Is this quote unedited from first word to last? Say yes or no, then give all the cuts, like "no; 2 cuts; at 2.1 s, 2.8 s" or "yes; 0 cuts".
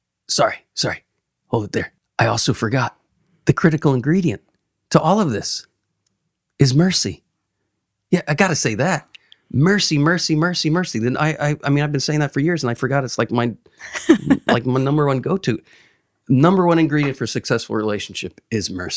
no; 1 cut; at 2.0 s